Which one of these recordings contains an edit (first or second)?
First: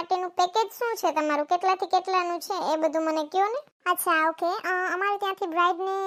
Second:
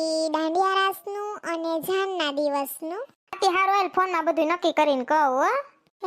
second